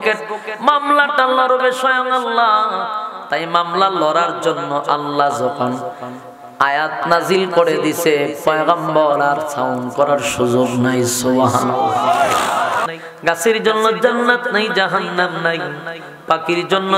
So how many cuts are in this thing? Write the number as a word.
one